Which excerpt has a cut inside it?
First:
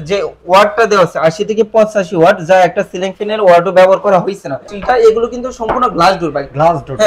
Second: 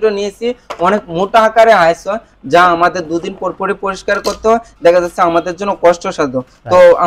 first; 1 cut; at 4.8 s

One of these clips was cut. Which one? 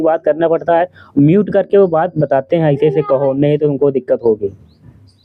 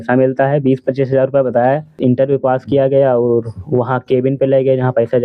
second; 1 cut; at 2.0 s

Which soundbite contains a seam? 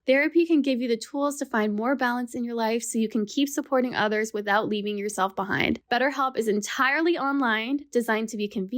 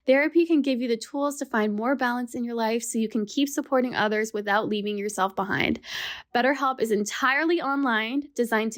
first; 1 cut; at 5.8 s

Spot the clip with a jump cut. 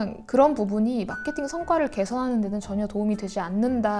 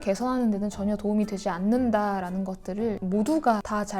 second; 1 cut; at 3.0 s

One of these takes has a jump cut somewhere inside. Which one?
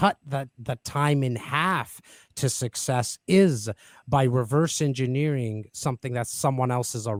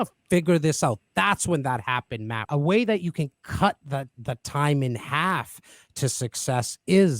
second; 1 cut; at 2.3 s

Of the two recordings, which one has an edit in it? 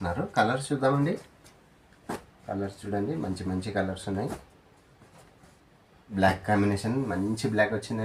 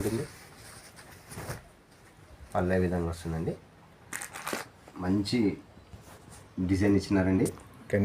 second; 1 cut; at 4.8 s

